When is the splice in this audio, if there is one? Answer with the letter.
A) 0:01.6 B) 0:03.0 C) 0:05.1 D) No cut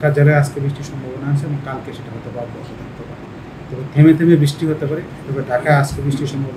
C